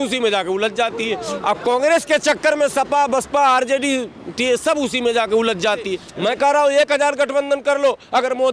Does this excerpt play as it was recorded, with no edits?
no; 1 cut; at 6.0 s

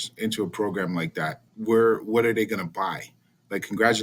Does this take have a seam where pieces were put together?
yes; 1 cut; at 1.5 s

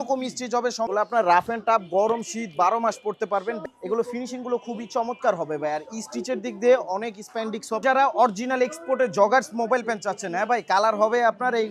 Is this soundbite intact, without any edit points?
no; 3 cuts; at 0.9 s, 3.6 s, 7.8 s

